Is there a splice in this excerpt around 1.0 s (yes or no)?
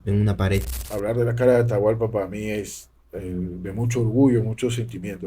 yes